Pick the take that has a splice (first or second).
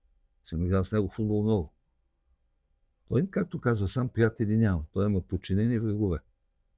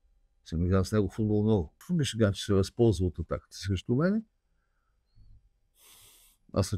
second